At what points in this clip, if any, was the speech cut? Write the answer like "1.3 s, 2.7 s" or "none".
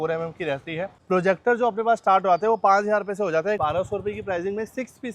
0.9 s, 3.6 s